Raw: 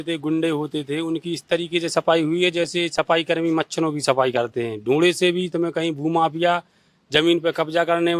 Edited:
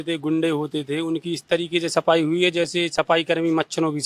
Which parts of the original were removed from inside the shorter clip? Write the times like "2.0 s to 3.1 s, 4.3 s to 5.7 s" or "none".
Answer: none